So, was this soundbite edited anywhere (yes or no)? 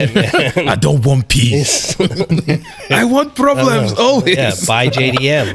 no